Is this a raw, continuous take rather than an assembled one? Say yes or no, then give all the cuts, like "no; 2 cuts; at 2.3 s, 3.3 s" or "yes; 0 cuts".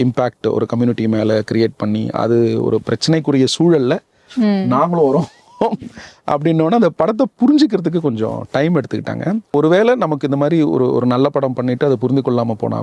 no; 1 cut; at 9.5 s